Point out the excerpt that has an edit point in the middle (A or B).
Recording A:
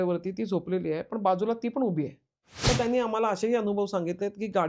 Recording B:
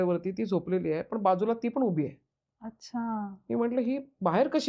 A